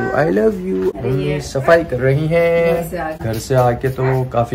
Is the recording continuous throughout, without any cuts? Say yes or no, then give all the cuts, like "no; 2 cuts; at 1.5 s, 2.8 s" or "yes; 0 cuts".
no; 2 cuts; at 0.9 s, 3.2 s